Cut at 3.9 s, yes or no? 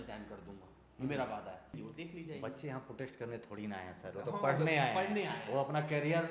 no